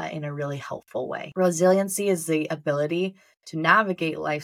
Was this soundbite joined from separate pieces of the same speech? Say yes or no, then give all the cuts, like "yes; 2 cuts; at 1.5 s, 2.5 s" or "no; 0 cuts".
yes; 1 cut; at 1.3 s